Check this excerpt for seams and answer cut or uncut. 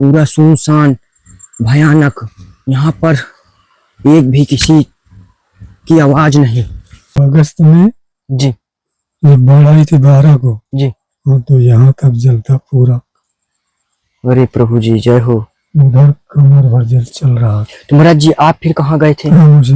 cut